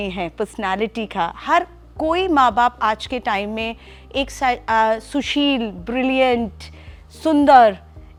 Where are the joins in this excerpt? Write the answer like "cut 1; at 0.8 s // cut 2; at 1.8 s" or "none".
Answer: none